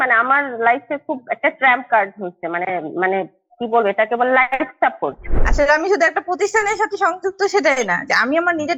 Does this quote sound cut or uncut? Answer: cut